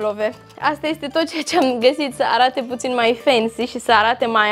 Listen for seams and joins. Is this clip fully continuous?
yes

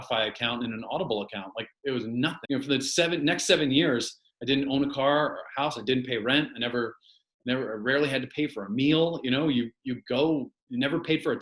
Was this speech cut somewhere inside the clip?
yes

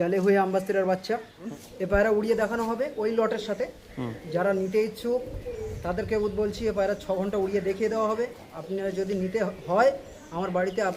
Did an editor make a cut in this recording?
yes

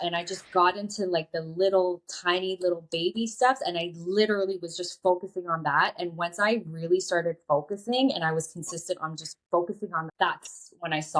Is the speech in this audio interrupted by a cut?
no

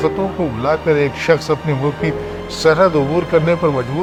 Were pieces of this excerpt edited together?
no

